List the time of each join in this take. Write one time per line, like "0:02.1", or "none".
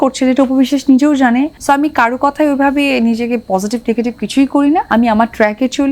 0:01.5
0:04.9